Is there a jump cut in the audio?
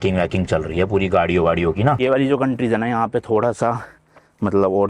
yes; 1 cut; at 2.0 s

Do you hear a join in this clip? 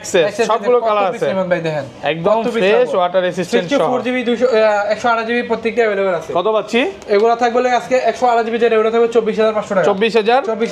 no; 0 cuts

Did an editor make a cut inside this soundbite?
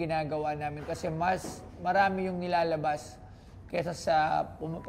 no; 0 cuts

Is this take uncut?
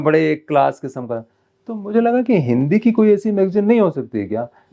yes; 0 cuts

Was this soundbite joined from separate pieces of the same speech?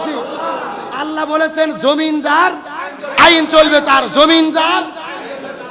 no; 0 cuts

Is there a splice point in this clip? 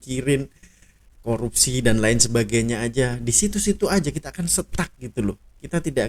no; 0 cuts

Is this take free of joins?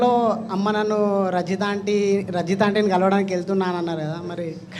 yes; 0 cuts

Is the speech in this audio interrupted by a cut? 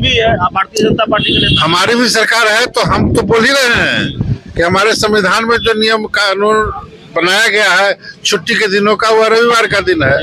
no; 0 cuts

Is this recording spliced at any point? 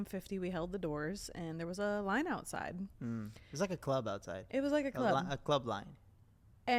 no; 0 cuts

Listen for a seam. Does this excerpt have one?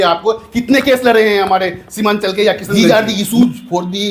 yes; 1 cut; at 2.6 s

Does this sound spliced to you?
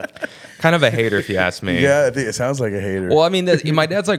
no; 0 cuts

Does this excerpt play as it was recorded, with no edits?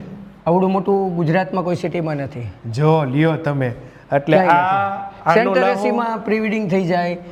yes; 0 cuts

